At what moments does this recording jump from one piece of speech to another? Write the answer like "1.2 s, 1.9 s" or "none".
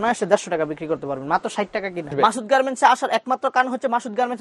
2.1 s